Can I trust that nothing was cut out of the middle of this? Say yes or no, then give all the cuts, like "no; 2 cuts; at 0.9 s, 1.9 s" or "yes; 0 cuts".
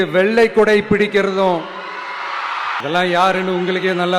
no; 1 cut; at 2.8 s